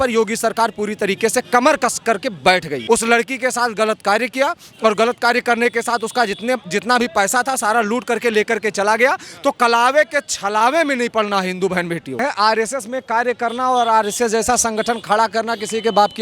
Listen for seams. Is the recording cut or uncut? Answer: cut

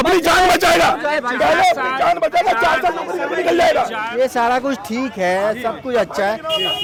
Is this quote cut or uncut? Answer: uncut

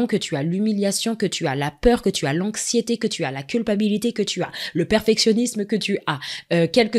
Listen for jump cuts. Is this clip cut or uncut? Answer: uncut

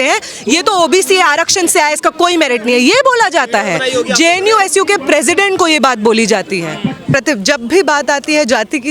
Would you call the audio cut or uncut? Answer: cut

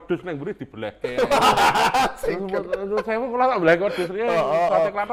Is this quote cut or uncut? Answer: uncut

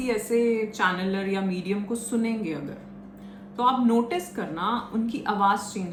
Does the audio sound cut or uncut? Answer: uncut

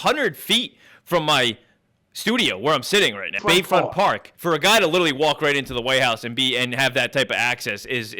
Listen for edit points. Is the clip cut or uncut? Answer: cut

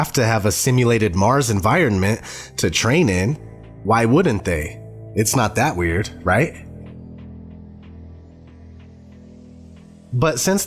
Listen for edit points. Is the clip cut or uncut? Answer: uncut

